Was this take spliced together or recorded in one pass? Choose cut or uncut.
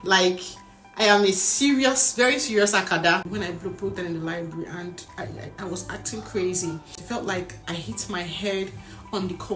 cut